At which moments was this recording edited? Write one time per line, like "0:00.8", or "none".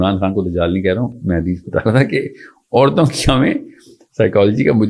none